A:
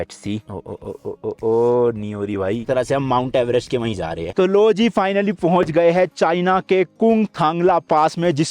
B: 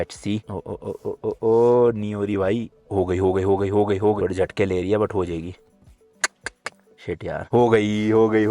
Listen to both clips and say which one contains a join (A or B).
A